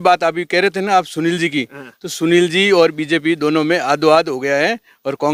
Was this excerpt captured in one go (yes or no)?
yes